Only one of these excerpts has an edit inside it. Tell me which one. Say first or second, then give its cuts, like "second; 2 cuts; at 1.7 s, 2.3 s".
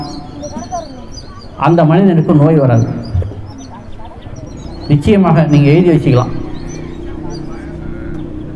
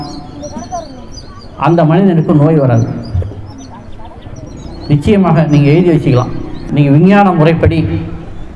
second; 1 cut; at 6.6 s